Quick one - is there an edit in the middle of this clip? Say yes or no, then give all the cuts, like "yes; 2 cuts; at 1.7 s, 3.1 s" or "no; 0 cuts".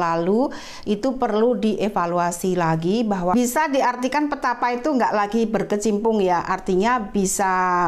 yes; 1 cut; at 3.3 s